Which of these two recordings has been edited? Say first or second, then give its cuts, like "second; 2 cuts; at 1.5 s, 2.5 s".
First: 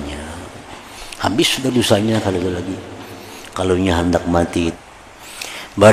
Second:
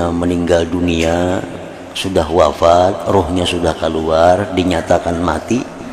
first; 1 cut; at 4.7 s